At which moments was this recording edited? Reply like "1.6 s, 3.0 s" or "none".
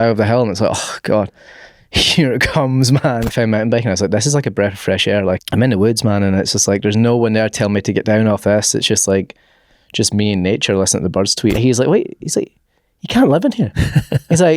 3.2 s, 5.4 s, 11.6 s